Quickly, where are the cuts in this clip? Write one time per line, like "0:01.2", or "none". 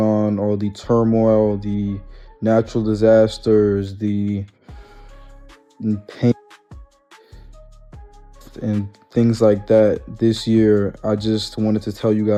none